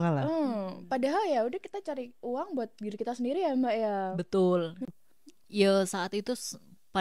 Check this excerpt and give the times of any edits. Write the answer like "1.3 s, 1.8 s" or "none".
4.8 s